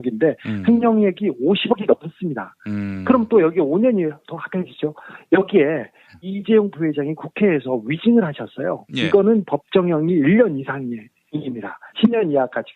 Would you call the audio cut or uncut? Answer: uncut